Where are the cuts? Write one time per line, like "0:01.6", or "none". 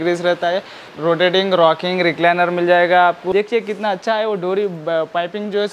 0:00.9
0:03.2